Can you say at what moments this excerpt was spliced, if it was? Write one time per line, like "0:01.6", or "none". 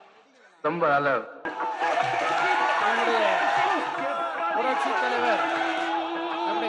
0:01.5

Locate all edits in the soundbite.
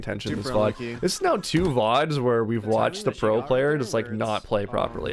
none

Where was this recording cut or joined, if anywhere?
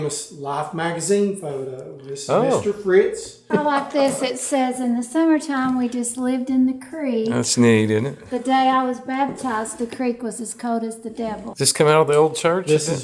0:03.5
0:11.5

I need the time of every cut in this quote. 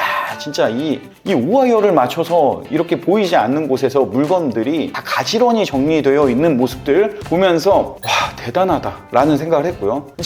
none

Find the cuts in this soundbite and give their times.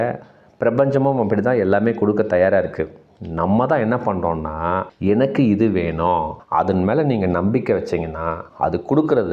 0:06.4

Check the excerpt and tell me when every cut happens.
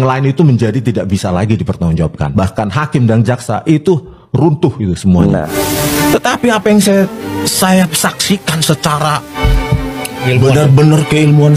0:02.2
0:05.5

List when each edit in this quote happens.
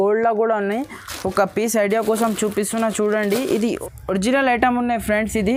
none

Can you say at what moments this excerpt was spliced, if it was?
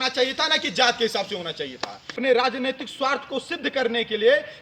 0:02.0

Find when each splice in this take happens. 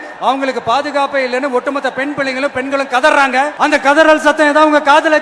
0:03.5

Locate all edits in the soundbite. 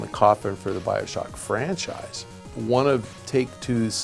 0:02.5

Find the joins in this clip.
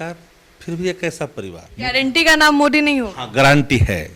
0:01.6

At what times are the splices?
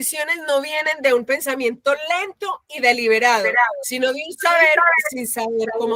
none

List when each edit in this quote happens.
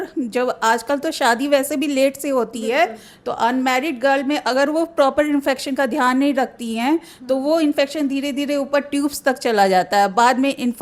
none

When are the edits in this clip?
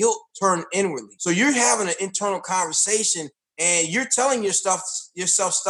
0:01.1

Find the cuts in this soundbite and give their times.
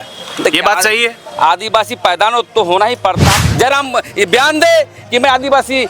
0:03.2

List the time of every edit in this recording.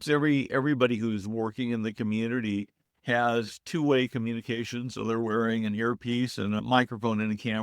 0:06.6

